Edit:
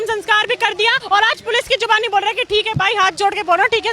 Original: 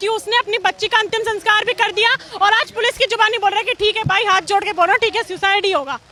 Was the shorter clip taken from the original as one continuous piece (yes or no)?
no